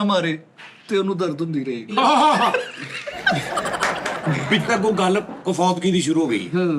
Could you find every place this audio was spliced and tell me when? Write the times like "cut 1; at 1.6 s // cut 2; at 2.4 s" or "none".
cut 1; at 1.9 s // cut 2; at 4.7 s